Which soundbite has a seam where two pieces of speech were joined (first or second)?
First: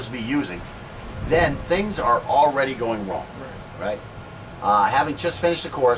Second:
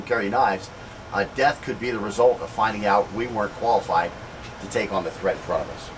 second